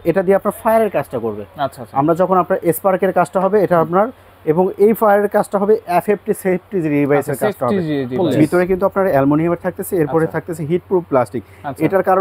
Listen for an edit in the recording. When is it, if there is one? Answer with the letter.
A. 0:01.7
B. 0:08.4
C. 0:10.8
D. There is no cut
B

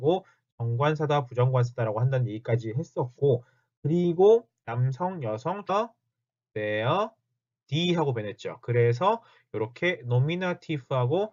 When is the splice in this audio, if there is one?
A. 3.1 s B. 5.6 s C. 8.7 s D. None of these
D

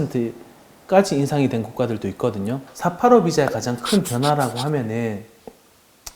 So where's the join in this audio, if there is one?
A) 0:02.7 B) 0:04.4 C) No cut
A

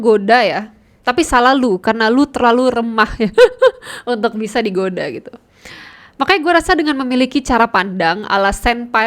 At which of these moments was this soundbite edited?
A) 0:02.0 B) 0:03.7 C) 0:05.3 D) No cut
D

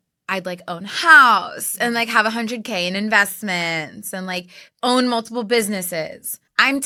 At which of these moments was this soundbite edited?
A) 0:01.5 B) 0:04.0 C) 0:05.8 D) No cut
D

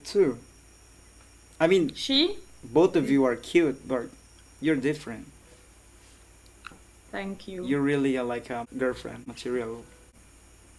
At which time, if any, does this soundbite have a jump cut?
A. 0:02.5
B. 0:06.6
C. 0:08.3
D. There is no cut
D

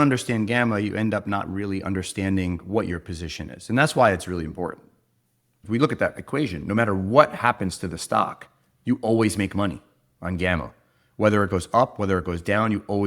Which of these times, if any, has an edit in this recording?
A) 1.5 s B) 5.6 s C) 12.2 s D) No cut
B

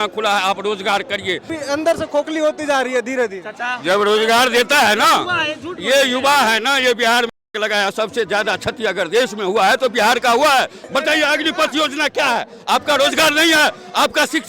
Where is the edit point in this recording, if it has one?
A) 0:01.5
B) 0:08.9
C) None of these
A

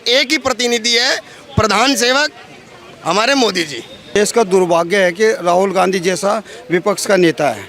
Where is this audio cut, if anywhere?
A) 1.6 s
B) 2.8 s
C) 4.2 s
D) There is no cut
C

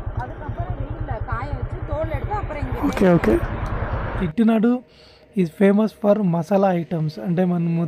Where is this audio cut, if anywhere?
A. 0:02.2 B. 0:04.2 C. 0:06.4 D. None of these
B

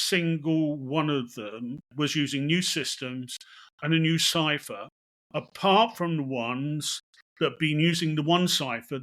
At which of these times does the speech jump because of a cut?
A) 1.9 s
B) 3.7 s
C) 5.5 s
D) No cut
A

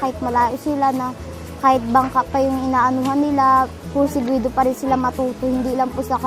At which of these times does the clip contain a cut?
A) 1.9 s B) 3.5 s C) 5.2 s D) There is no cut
D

